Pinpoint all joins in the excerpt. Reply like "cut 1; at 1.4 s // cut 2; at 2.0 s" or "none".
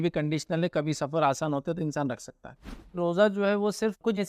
cut 1; at 3.0 s

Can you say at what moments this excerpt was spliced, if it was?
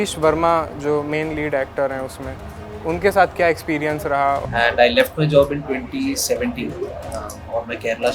cut 1; at 4.4 s

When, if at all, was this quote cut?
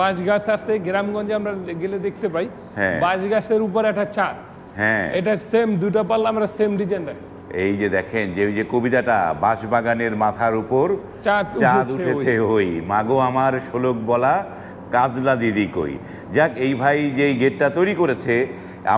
none

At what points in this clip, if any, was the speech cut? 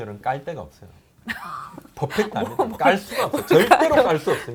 none

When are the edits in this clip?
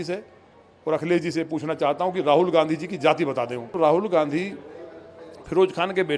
cut 1; at 3.8 s

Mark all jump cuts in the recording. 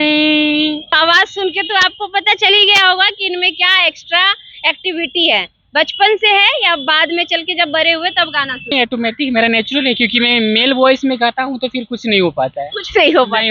cut 1; at 1.0 s // cut 2; at 8.7 s

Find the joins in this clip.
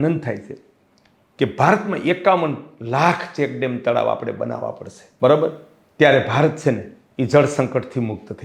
none

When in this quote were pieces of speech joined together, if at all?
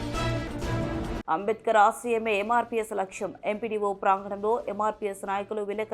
cut 1; at 1.2 s

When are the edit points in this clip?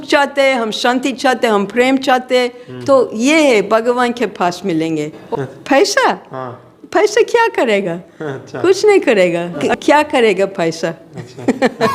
cut 1; at 5.1 s // cut 2; at 9.7 s

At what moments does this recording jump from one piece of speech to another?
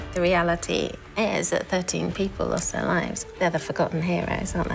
cut 1; at 3.2 s

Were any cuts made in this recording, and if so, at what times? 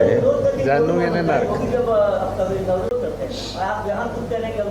cut 1; at 2.9 s

